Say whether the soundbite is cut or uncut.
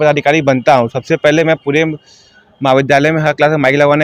uncut